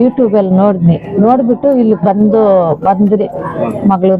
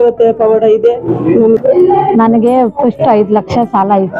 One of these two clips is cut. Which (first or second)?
second